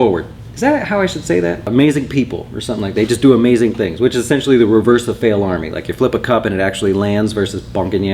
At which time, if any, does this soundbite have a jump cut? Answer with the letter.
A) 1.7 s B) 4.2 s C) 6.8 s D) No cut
A